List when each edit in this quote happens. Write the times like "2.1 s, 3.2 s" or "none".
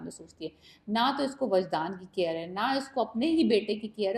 none